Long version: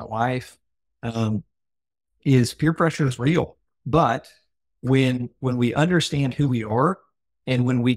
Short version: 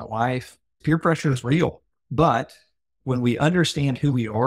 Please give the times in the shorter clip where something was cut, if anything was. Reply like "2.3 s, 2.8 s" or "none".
0.8 s, 2.9 s